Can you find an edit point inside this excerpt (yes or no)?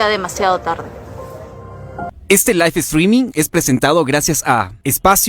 yes